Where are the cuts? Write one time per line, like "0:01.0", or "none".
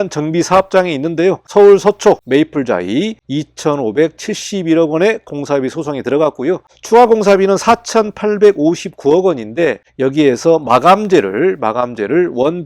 0:01.5
0:02.2
0:03.2